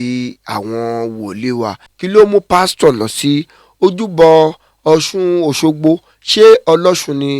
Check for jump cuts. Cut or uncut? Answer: cut